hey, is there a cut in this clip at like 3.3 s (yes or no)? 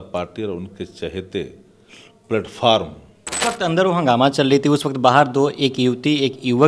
yes